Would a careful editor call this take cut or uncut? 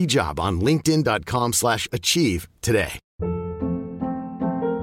cut